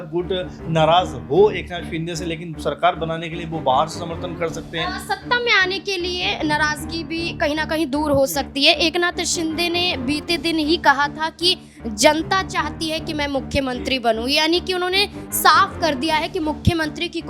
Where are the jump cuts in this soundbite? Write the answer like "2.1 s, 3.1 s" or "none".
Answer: none